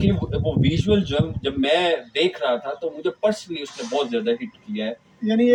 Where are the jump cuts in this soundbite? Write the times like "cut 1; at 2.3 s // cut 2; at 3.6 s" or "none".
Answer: none

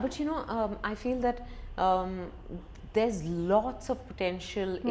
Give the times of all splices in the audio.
none

